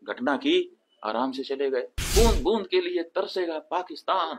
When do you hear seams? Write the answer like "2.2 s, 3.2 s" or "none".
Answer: 2.0 s